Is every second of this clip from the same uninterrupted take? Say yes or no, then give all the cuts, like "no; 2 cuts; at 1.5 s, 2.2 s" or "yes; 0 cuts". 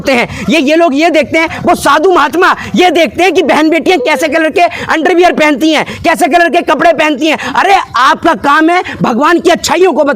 yes; 0 cuts